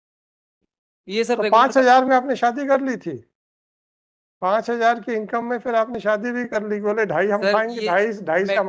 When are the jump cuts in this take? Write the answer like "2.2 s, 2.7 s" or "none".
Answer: none